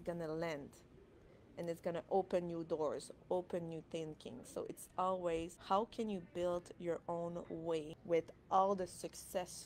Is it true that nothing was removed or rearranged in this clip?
no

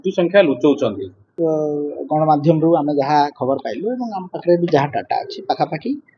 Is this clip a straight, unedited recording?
no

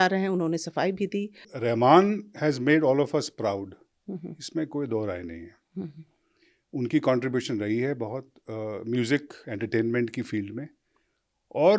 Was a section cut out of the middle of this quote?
yes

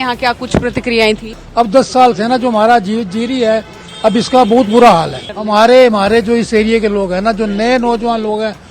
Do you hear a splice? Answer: yes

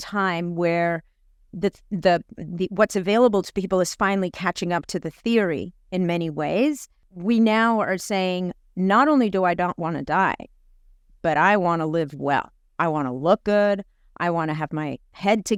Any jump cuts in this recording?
no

